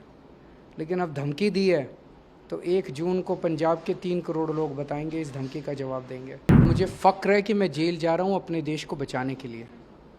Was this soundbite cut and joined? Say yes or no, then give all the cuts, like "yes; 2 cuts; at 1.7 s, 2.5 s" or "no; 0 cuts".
yes; 1 cut; at 6.6 s